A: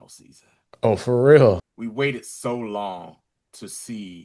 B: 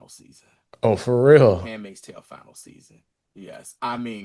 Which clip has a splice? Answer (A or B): A